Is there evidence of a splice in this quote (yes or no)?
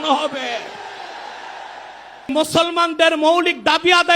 yes